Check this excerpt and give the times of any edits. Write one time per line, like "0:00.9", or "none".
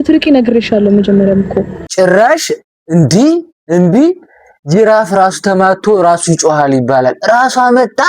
0:01.8